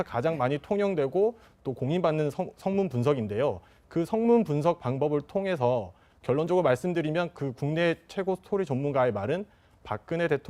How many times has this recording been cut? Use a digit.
0